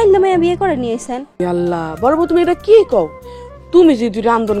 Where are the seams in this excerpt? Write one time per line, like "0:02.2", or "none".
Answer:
0:01.3